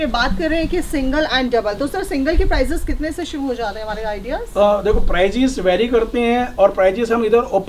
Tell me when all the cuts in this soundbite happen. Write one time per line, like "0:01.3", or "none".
none